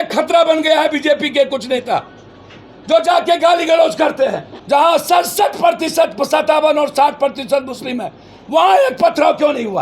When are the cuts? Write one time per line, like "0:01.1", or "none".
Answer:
0:04.5